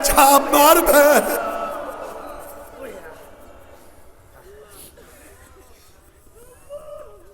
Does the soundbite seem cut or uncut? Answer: uncut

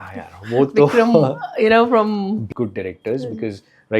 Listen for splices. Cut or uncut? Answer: cut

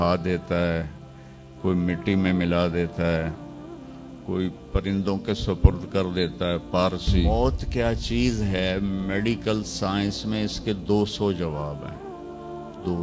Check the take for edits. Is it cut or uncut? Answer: cut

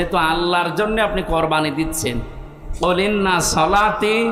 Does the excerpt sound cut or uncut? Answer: uncut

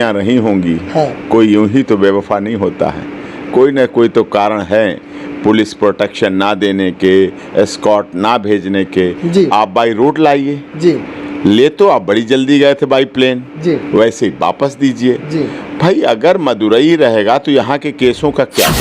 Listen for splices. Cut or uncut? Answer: uncut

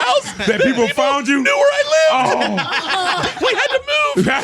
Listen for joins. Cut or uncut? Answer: cut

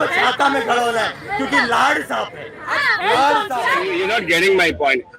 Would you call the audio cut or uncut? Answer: cut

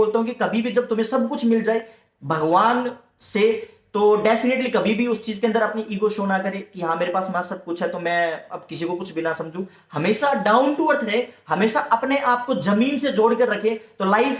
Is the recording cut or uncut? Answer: uncut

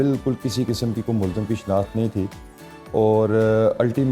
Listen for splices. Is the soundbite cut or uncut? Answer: uncut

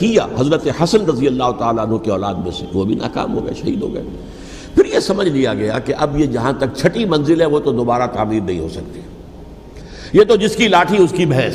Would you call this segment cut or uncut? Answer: uncut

